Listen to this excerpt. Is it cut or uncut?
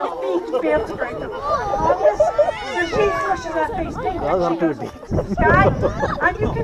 uncut